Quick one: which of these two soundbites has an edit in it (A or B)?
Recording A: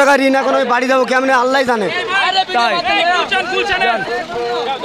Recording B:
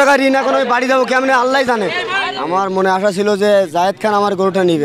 B